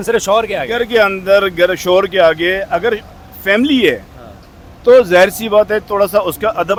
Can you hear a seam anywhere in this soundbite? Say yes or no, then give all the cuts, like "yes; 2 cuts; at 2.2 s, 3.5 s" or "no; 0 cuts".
no; 0 cuts